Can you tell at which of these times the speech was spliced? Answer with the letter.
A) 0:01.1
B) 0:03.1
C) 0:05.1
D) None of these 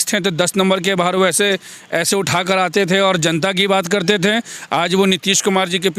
D